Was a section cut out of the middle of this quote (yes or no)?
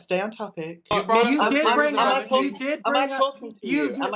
yes